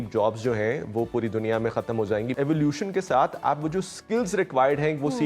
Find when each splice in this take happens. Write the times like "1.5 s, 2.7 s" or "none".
2.3 s